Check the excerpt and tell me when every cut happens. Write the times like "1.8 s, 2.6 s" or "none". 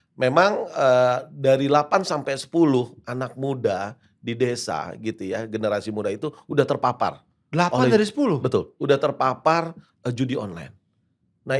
none

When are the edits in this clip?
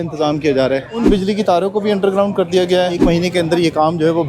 1.0 s, 3.0 s

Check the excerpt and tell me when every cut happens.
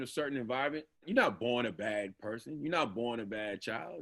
1.1 s

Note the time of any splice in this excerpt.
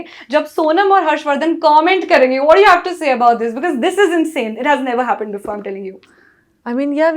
none

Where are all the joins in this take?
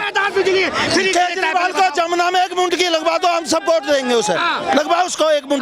none

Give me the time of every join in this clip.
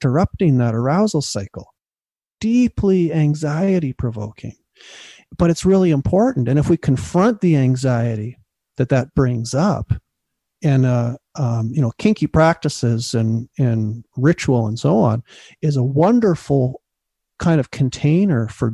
5.2 s, 10.6 s

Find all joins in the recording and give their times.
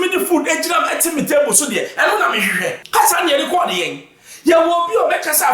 2.8 s

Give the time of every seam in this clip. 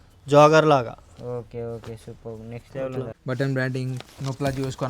3.1 s

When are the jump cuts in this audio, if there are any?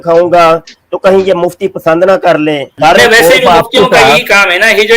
2.7 s

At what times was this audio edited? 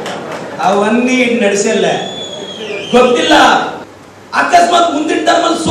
3.8 s

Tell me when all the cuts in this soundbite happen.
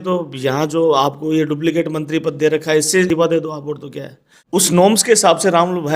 3.1 s, 4.6 s

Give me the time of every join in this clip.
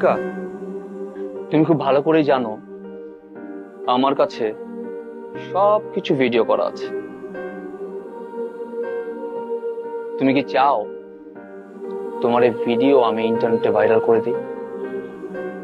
1.2 s

